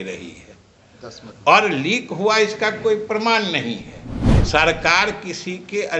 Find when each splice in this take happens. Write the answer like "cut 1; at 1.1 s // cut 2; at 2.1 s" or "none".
cut 1; at 4.4 s